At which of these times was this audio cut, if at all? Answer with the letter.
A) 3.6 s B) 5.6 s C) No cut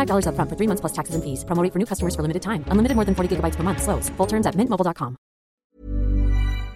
B